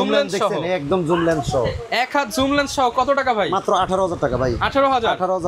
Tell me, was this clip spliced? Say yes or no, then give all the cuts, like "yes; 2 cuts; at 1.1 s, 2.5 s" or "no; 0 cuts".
no; 0 cuts